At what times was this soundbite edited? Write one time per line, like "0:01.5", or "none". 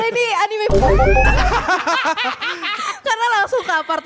none